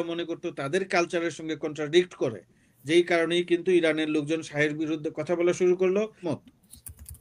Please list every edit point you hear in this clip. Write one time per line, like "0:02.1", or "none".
0:06.3